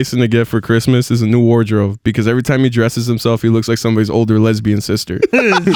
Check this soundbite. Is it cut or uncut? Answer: uncut